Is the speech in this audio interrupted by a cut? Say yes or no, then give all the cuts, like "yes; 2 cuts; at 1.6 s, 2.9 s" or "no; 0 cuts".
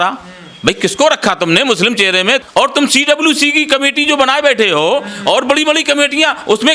yes; 1 cut; at 2.4 s